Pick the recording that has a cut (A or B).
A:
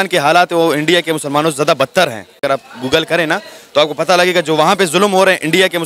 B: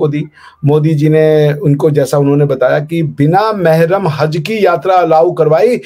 A